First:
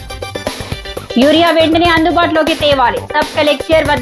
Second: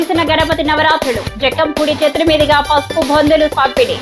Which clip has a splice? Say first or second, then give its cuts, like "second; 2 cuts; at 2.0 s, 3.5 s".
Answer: first; 1 cut; at 1.0 s